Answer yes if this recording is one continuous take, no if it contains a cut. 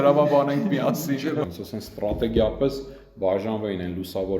no